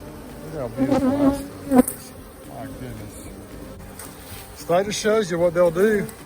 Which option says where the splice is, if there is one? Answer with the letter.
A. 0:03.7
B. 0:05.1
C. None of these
A